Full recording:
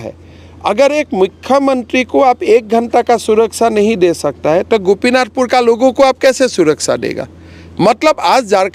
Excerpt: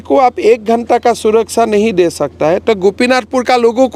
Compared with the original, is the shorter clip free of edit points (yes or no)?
yes